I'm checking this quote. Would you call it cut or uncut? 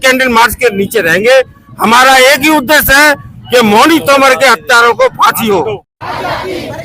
cut